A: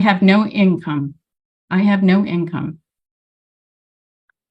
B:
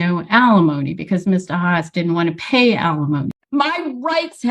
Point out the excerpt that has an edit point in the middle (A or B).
B